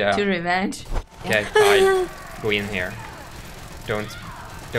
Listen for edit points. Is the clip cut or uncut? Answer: cut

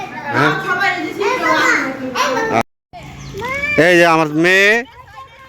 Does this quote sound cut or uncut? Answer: cut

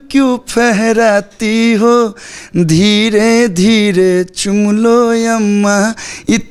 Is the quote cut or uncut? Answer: uncut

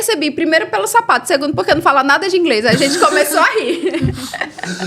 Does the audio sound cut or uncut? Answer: uncut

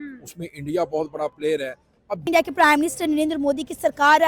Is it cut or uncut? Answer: cut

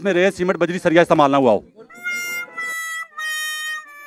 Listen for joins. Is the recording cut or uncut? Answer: uncut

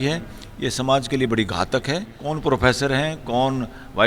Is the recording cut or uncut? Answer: cut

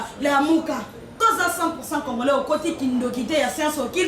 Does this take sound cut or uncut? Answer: cut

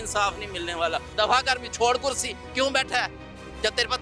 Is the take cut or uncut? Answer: cut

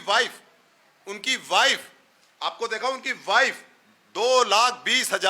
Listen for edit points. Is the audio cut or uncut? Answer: uncut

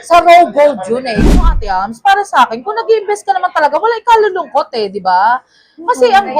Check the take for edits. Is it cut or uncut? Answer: cut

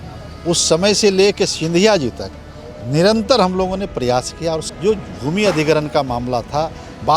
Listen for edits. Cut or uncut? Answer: cut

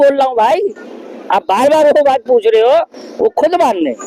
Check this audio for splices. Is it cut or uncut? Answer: uncut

